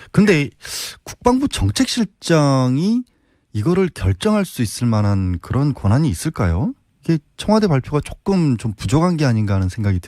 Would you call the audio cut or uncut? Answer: cut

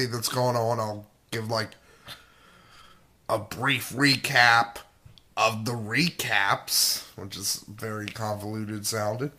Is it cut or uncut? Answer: cut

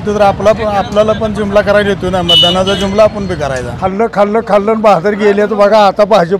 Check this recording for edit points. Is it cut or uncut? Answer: cut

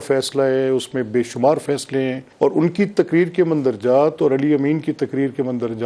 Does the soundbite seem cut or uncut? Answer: cut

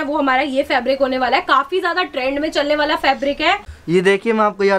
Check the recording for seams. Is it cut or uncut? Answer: cut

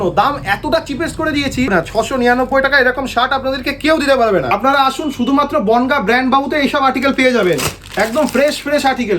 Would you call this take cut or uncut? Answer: cut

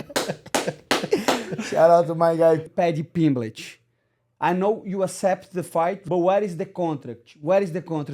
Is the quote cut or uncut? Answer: cut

